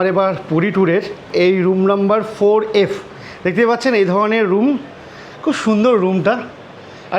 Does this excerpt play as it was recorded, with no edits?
no; 1 cut; at 1.3 s

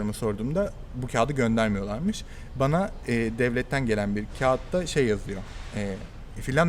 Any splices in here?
no; 0 cuts

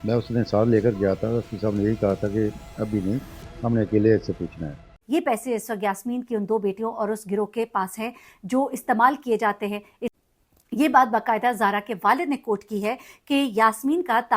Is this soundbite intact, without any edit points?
no; 2 cuts; at 5.0 s, 10.1 s

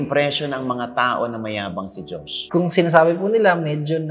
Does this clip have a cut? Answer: yes; 1 cut; at 2.4 s

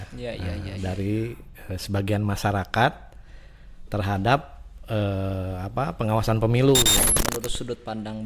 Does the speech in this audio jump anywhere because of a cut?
yes; 1 cut; at 7.1 s

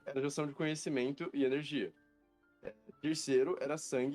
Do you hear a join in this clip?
yes; 1 cut; at 1.2 s

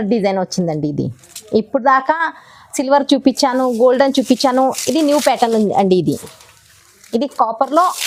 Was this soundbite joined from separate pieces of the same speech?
no; 0 cuts

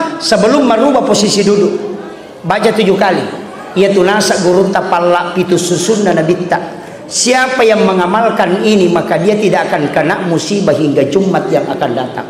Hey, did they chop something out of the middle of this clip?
no; 0 cuts

